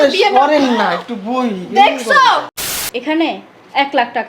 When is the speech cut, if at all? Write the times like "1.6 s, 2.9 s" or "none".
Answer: 2.6 s